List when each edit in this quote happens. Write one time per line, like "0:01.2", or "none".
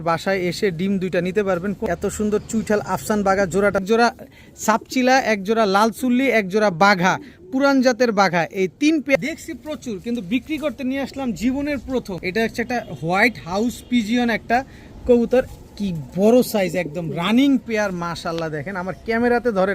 0:01.8
0:03.8
0:09.2
0:12.2